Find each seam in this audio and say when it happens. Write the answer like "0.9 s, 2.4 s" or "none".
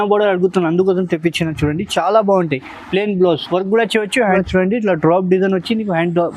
4.4 s